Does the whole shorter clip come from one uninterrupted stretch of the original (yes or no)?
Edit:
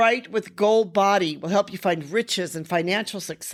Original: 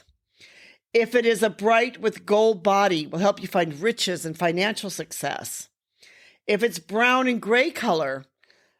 yes